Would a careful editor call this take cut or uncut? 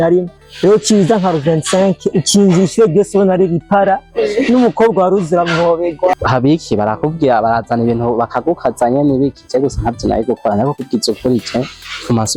cut